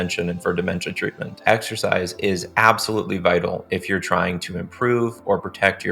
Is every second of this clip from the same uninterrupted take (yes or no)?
no